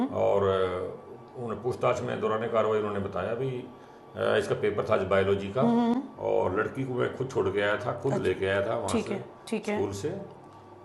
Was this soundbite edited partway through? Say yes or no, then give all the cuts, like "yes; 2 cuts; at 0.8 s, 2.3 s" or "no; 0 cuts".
yes; 1 cut; at 5.9 s